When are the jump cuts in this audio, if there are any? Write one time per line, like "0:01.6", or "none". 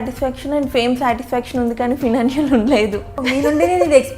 0:03.2